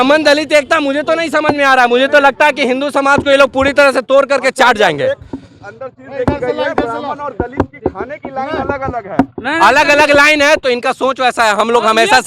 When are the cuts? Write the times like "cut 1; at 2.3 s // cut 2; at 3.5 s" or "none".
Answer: none